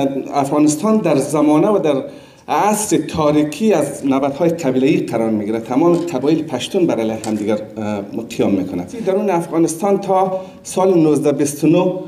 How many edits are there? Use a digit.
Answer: 1